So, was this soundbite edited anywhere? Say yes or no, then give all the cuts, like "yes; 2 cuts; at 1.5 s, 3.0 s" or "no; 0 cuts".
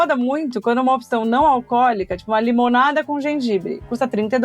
no; 0 cuts